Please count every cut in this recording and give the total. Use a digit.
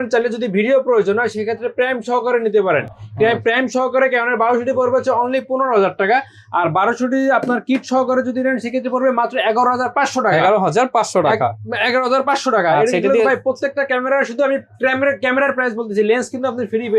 0